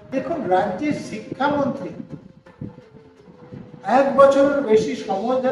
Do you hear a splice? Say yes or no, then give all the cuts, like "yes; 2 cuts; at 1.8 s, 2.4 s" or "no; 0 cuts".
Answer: no; 0 cuts